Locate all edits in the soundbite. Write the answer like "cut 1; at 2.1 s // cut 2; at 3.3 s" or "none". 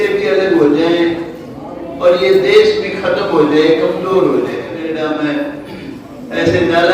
cut 1; at 4.8 s